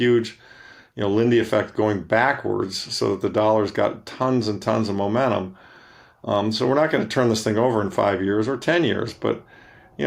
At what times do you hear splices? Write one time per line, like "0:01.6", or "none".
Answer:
none

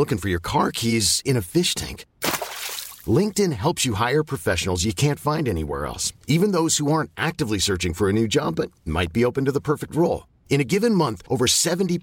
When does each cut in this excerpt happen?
none

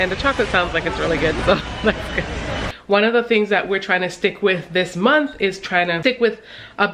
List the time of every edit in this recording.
0:02.7
0:06.0

